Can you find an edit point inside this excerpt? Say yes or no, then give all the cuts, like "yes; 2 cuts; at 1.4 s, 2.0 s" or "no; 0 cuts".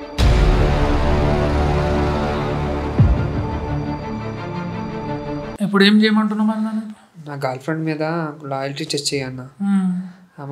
no; 0 cuts